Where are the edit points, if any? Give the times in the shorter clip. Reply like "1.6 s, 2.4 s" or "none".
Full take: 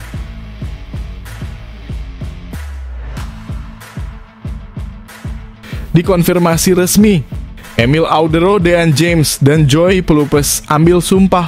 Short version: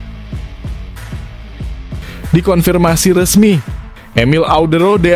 2.3 s